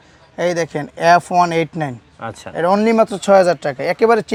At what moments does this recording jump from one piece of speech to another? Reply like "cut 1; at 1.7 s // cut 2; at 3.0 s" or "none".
none